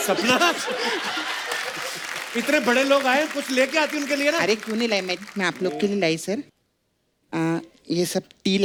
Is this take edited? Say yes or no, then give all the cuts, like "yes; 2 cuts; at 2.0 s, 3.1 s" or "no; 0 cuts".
no; 0 cuts